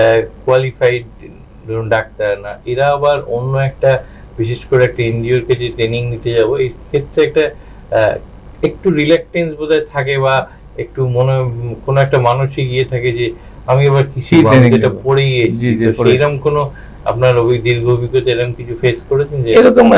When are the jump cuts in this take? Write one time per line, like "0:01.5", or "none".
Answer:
none